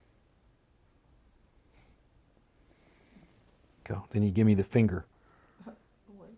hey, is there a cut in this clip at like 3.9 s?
yes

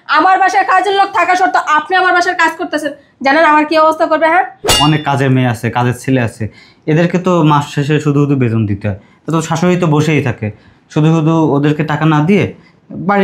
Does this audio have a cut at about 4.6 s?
yes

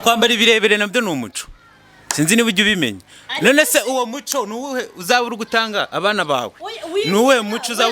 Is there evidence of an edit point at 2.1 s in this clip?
no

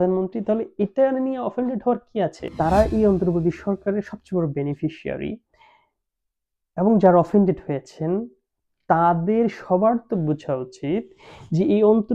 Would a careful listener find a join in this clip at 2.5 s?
yes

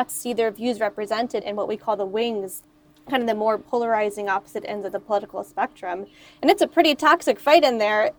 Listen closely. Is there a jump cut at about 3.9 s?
no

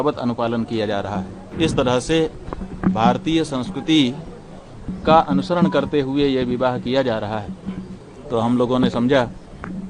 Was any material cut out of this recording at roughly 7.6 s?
no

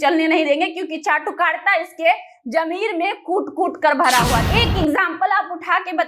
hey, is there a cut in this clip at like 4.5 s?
yes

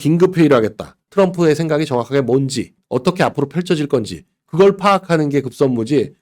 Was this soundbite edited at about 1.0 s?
yes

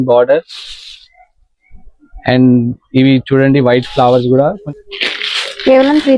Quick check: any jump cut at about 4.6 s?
yes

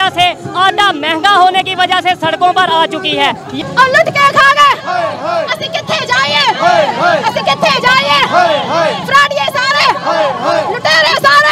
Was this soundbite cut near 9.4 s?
no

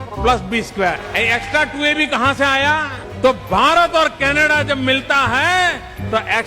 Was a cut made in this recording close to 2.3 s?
no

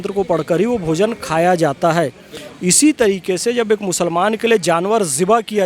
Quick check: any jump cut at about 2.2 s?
no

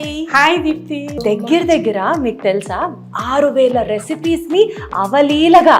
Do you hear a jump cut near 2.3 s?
no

